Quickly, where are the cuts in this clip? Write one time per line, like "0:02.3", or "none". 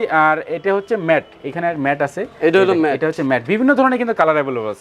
none